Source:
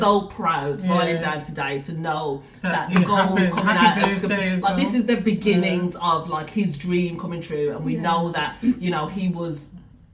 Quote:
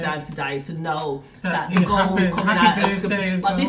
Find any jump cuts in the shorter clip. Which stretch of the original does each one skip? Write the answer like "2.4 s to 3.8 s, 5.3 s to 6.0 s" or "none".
none